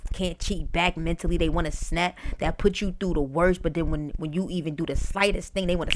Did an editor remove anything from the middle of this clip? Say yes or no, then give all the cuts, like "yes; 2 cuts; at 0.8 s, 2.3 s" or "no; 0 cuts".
no; 0 cuts